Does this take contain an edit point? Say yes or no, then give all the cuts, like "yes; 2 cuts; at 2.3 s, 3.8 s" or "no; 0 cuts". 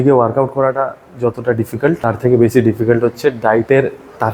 yes; 1 cut; at 2.0 s